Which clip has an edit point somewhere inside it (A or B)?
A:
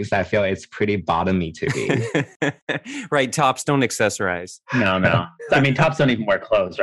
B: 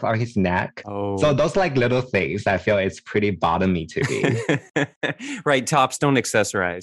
A